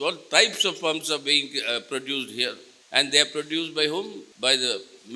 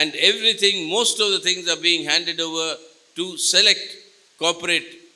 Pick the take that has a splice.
first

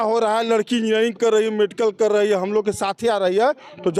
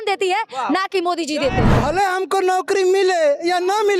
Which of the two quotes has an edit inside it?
second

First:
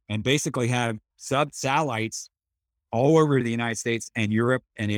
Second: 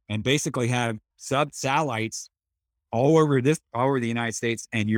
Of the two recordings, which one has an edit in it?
first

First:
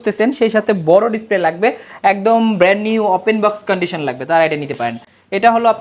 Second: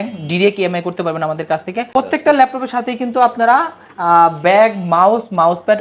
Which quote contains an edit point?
second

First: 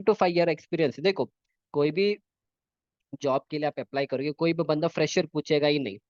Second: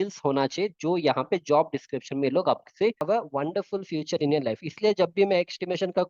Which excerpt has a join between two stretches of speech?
second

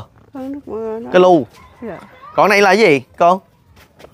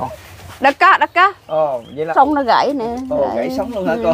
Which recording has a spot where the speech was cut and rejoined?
second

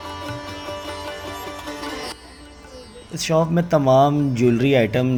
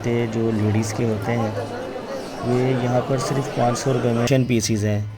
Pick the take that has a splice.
second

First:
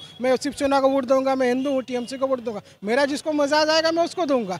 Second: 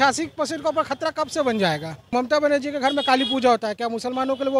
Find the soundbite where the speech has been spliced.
second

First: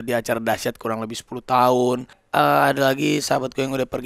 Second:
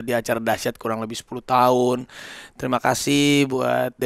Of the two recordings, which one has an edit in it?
first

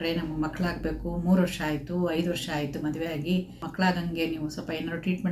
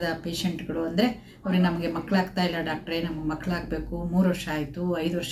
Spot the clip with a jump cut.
first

